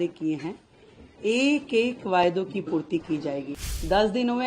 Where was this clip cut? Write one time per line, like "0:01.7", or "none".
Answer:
0:03.5

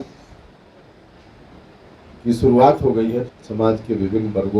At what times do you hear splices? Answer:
0:03.3

